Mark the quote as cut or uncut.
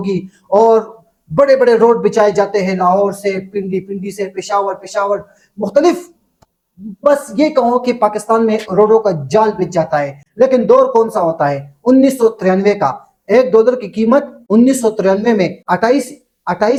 uncut